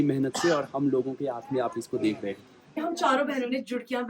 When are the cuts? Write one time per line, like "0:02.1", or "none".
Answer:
0:02.8